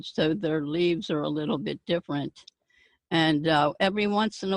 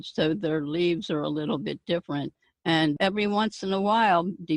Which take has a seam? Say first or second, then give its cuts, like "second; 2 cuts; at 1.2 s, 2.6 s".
second; 1 cut; at 2.9 s